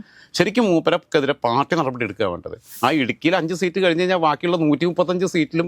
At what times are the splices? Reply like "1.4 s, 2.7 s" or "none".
2.7 s

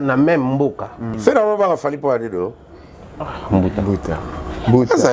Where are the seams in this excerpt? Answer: 1.1 s

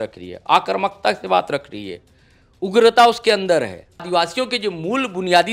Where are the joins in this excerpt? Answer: 4.1 s

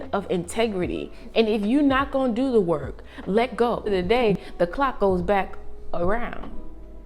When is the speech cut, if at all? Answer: 3.9 s

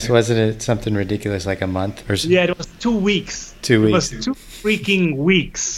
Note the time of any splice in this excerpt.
2.0 s

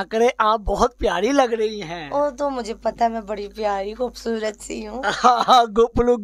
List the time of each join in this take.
none

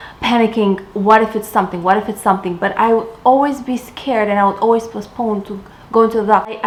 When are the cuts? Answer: none

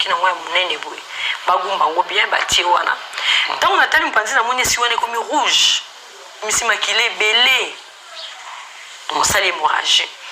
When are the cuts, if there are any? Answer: 6.4 s

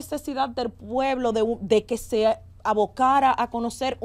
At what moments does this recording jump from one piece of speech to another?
none

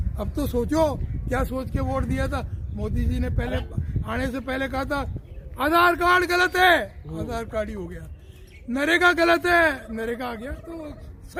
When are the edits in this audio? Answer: none

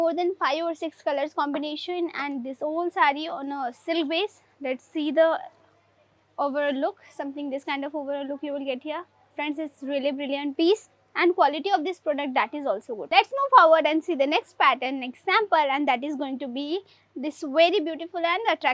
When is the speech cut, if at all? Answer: 13.0 s

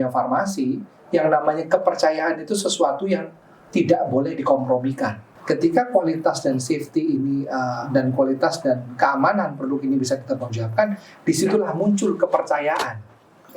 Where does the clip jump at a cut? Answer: 5.3 s

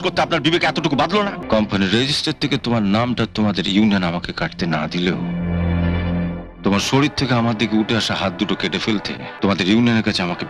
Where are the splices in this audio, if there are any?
1.4 s, 9.3 s

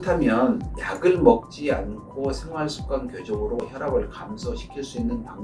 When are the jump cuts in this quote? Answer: none

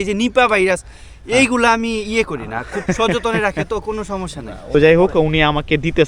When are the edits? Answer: 4.7 s

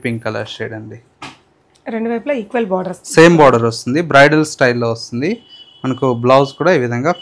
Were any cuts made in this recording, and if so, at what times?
none

